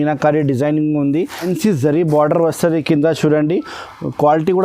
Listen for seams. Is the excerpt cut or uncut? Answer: cut